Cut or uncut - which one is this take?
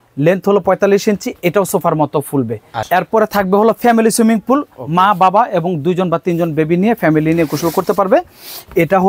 cut